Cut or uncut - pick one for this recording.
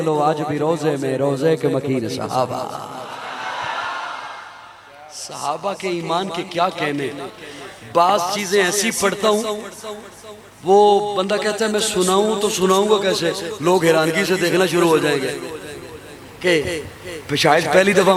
uncut